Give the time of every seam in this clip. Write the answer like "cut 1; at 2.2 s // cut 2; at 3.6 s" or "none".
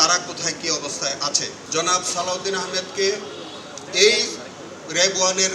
cut 1; at 1.6 s